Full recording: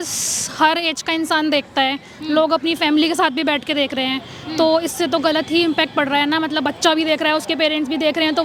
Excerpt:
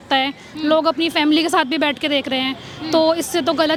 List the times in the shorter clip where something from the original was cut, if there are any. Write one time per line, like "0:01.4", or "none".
none